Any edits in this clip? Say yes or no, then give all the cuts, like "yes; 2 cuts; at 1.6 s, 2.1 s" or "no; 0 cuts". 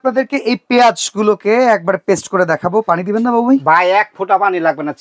no; 0 cuts